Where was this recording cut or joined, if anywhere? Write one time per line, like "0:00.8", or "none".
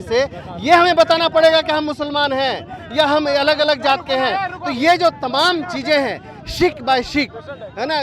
none